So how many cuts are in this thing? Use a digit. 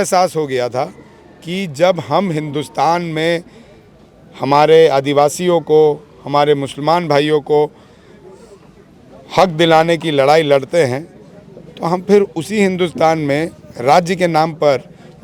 0